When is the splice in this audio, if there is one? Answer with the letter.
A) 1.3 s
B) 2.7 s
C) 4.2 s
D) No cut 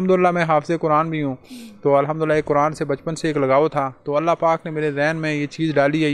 D